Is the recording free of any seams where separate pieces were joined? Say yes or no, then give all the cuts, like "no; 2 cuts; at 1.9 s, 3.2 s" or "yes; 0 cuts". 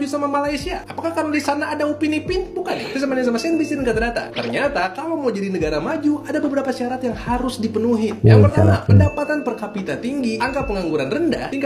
yes; 0 cuts